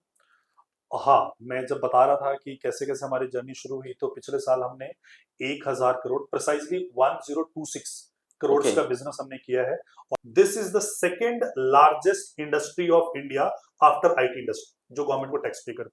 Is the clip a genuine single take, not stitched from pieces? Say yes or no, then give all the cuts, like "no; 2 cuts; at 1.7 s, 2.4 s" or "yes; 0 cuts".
no; 1 cut; at 9.9 s